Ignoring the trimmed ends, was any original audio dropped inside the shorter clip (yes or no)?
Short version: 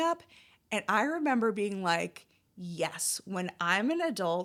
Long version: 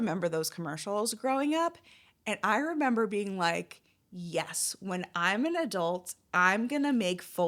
no